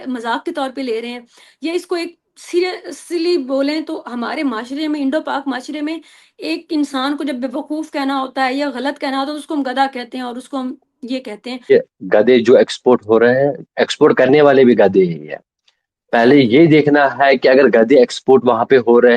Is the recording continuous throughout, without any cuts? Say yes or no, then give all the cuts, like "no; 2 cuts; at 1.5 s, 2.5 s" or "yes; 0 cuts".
no; 1 cut; at 11.6 s